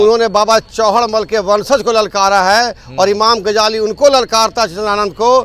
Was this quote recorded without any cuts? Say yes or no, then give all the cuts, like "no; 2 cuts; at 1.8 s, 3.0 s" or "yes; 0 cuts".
yes; 0 cuts